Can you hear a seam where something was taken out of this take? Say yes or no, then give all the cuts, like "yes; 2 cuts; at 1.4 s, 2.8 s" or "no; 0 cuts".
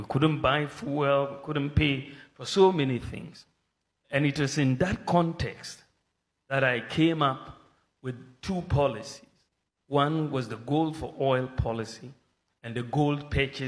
no; 0 cuts